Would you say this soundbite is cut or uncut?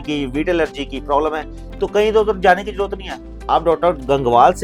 uncut